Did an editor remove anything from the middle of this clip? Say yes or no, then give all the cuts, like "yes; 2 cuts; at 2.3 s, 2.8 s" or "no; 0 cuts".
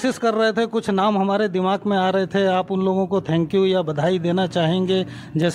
no; 0 cuts